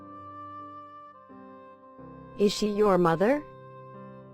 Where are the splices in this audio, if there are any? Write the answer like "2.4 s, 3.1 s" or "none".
2.4 s, 3.4 s